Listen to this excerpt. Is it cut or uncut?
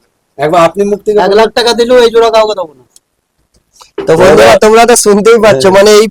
uncut